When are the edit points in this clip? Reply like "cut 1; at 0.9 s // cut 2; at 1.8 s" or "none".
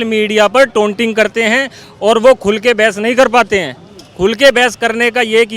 none